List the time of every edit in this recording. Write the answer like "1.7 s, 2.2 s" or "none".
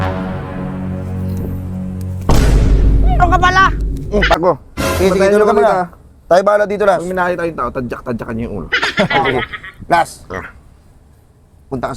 4.4 s